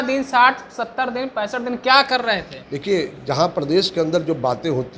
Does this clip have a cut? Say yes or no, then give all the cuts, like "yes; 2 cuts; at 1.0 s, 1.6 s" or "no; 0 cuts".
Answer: no; 0 cuts